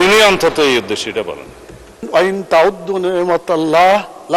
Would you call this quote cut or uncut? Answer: cut